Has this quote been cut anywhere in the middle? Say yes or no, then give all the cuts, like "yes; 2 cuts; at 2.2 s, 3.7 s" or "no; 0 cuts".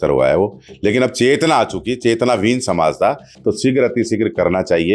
yes; 1 cut; at 3.3 s